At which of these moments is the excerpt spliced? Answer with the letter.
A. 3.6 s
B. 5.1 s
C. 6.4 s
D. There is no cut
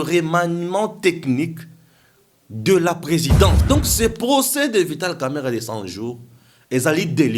A